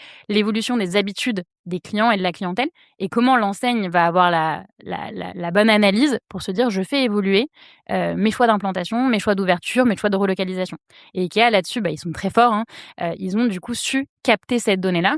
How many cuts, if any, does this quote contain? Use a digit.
0